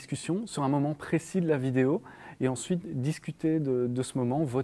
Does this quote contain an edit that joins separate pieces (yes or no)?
no